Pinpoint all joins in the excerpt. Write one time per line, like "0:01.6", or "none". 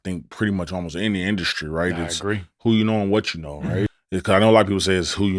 0:03.9